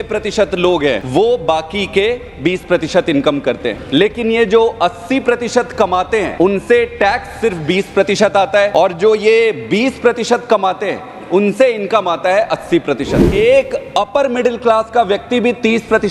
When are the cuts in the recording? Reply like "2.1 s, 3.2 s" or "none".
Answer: 1.0 s, 3.8 s, 6.3 s, 8.7 s, 13.2 s